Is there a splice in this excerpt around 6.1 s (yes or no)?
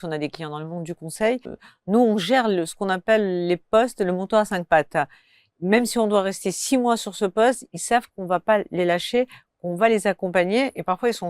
no